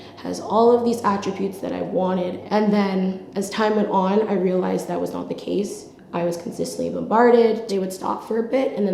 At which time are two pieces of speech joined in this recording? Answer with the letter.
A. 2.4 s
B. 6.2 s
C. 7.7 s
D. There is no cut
A